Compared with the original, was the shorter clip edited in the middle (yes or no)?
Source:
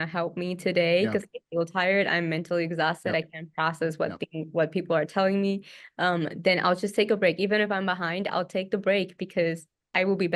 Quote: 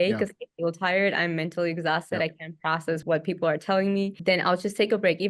yes